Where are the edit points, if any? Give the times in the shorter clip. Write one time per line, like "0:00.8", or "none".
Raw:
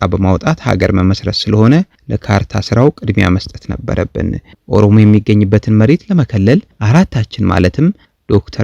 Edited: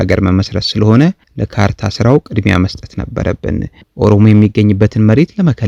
none